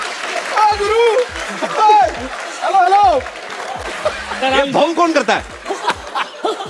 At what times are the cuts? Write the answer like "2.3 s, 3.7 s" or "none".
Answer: 3.9 s